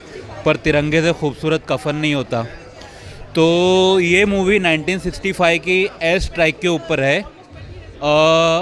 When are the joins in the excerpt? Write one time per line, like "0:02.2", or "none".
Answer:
none

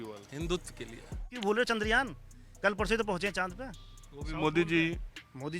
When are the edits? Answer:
0:01.3

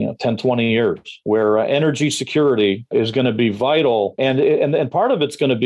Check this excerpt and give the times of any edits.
0:01.1
0:02.8
0:04.2

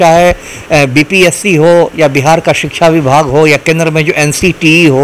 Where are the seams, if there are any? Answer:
none

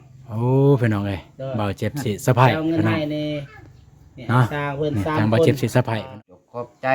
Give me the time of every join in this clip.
0:06.0

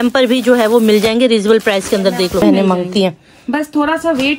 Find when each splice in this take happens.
0:02.4

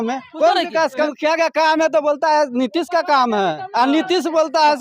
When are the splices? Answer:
0:00.9

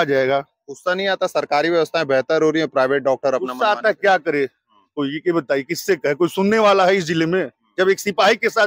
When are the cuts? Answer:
none

